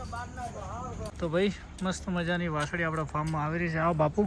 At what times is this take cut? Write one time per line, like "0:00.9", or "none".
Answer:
0:01.1